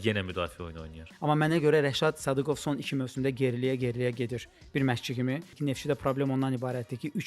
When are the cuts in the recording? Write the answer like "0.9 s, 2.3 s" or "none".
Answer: 1.0 s, 5.5 s